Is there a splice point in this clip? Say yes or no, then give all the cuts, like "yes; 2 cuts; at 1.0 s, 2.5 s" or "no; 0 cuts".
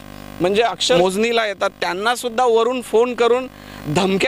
yes; 1 cut; at 1.0 s